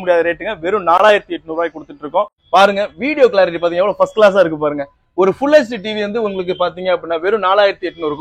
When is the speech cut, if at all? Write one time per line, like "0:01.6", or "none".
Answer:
0:02.4